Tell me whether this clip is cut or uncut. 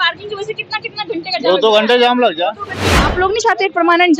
cut